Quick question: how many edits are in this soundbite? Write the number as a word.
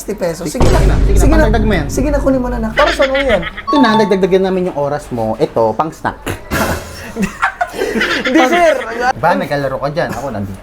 two